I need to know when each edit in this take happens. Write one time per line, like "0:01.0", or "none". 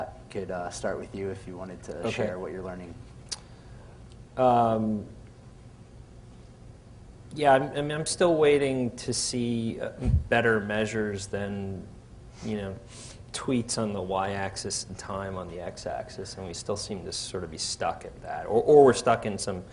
none